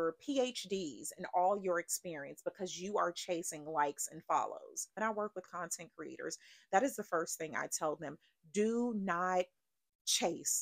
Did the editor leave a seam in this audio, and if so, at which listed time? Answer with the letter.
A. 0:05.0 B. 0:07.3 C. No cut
A